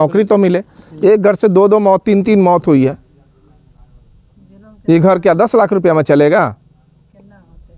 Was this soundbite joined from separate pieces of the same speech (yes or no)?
no